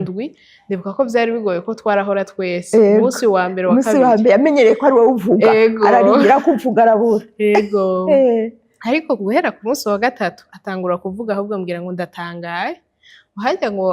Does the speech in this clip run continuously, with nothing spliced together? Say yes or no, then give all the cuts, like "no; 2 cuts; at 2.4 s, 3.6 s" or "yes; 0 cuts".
yes; 0 cuts